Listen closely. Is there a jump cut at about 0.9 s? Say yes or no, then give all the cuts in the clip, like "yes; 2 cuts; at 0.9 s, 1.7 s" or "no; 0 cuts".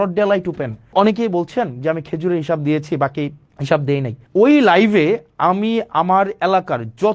yes; 3 cuts; at 0.9 s, 3.5 s, 4.2 s